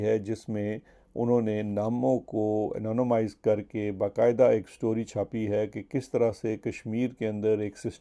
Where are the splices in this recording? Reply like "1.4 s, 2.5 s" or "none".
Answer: none